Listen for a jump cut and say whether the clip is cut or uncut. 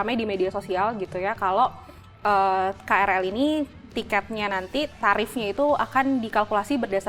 uncut